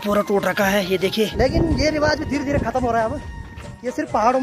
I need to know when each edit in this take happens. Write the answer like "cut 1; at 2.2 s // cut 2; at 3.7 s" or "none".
cut 1; at 1.3 s